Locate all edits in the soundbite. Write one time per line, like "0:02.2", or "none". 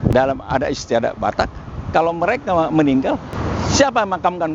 none